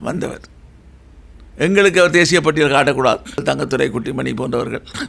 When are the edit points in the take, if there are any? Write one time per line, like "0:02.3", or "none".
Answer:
0:03.4